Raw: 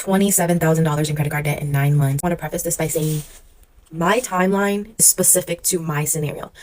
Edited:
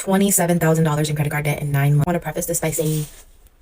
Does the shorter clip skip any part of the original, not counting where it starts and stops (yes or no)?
yes